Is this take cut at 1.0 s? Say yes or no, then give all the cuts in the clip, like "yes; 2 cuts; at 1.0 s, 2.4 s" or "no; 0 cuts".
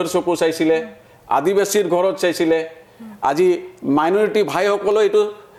no; 0 cuts